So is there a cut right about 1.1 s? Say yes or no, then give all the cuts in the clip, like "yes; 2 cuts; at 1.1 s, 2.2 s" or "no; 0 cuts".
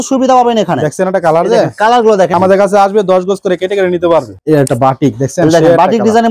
no; 2 cuts; at 2.3 s, 4.4 s